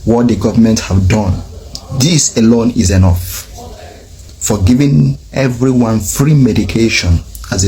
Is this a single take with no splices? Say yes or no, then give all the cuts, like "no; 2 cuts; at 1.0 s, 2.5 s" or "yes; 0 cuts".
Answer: yes; 0 cuts